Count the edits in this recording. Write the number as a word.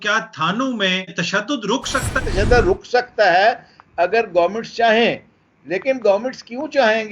two